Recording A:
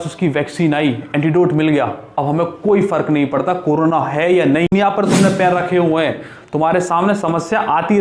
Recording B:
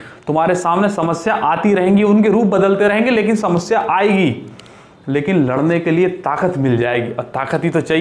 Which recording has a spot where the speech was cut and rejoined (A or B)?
A